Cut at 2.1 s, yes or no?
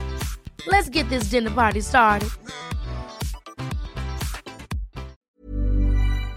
no